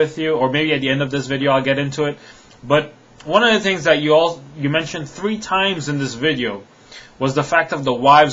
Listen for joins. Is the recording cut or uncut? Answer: uncut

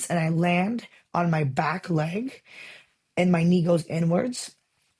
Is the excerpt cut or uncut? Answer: uncut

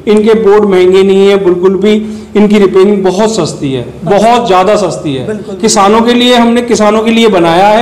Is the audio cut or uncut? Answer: uncut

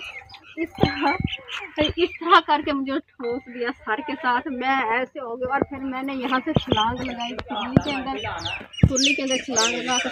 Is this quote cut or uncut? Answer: uncut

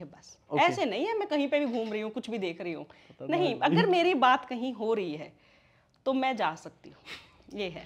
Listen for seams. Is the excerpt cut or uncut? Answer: uncut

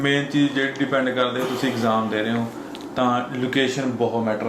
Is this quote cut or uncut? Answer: uncut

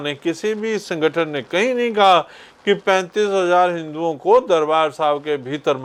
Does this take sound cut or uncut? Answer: uncut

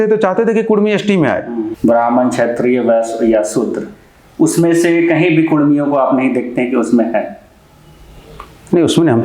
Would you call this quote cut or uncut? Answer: cut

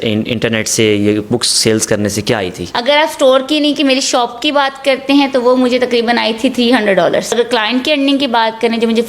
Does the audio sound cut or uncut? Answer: cut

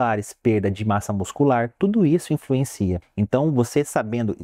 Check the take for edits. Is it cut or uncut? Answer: cut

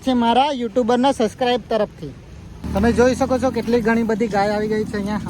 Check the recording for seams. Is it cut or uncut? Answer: cut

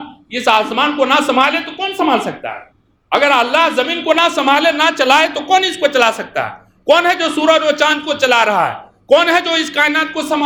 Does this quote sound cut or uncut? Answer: uncut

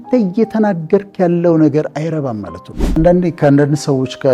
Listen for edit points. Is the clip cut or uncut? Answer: cut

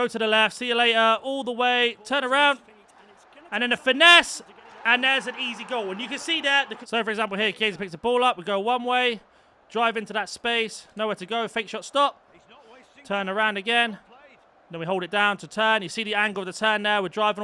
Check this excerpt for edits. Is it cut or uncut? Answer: cut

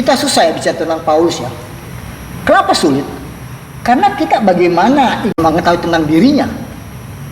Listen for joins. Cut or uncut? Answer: cut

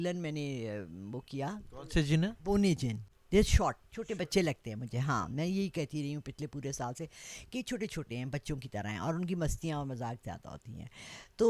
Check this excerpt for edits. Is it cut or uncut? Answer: uncut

